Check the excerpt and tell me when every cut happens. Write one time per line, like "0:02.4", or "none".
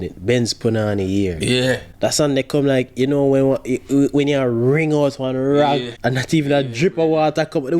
0:01.9
0:05.9